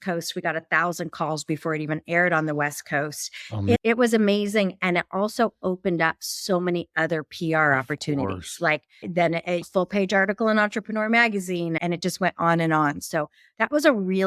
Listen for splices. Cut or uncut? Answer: uncut